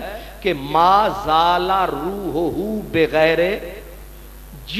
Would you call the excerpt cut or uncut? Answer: uncut